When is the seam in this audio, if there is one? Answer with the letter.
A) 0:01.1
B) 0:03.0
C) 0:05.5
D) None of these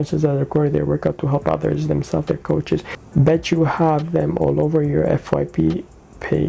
B